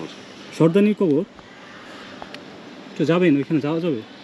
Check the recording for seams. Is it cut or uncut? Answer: uncut